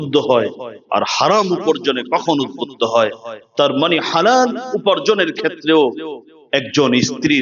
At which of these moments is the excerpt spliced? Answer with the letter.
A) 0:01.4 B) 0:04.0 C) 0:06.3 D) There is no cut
D